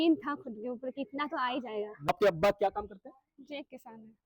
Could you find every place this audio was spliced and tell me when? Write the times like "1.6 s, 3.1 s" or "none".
2.1 s